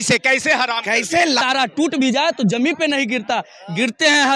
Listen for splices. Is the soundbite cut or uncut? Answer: cut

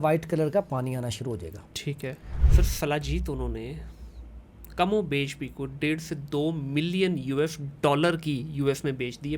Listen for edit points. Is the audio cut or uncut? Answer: cut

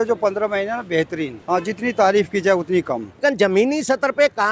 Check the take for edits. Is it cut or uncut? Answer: cut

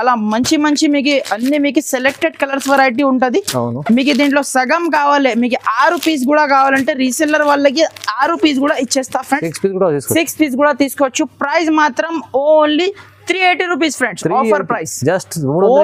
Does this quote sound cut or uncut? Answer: uncut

